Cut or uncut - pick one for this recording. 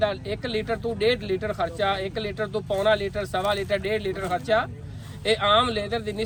uncut